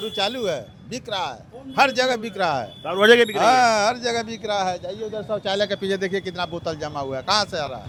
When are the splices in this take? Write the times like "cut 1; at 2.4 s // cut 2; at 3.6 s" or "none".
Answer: none